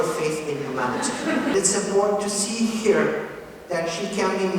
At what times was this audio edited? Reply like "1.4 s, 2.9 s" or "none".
1.5 s